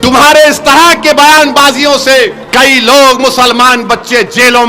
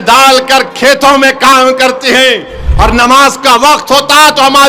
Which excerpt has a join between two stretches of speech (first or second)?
first